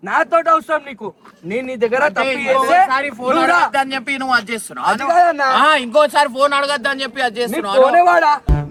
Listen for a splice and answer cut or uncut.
uncut